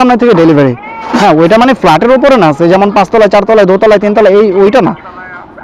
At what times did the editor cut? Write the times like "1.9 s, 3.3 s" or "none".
1.2 s